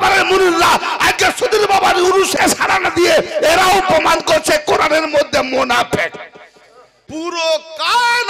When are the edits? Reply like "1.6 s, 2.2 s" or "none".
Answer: 2.3 s, 7.0 s